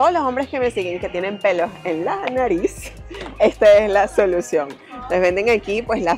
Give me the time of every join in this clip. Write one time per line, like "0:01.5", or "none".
none